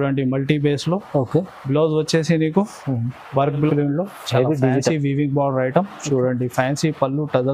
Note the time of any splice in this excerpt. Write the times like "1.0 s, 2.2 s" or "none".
3.7 s

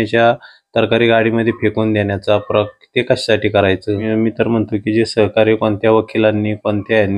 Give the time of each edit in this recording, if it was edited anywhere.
4.1 s

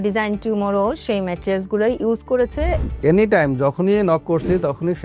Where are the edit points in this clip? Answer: 2.8 s

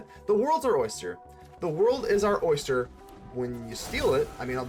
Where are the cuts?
none

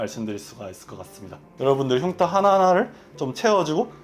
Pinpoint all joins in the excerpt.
1.4 s

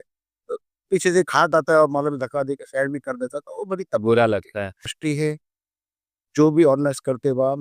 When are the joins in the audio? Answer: 5.0 s

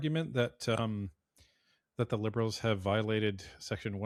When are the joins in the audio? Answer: none

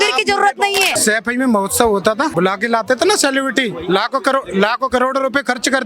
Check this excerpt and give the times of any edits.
1.0 s, 2.3 s

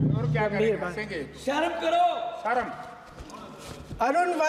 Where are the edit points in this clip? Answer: none

